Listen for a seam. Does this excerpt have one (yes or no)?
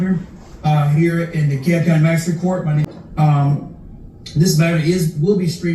yes